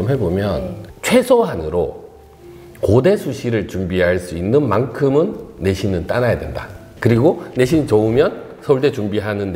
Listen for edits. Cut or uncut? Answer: cut